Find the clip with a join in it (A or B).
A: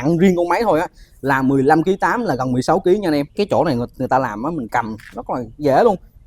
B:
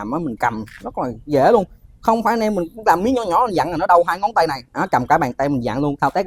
A